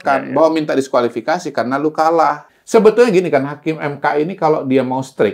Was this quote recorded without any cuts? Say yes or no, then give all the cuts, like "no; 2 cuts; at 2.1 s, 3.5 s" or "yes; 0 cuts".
no; 1 cut; at 2.5 s